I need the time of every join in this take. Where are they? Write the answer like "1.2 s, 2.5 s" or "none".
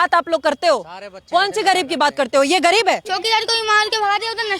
3.1 s